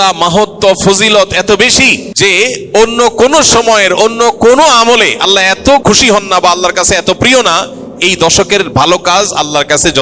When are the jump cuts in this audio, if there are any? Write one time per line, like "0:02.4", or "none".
0:02.1
0:05.8